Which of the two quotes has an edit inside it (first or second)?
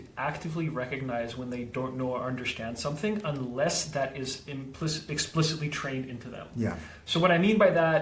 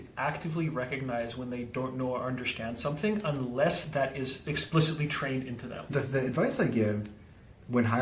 second